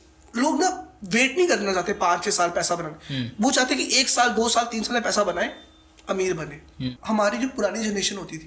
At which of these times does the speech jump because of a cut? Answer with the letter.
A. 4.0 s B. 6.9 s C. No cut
B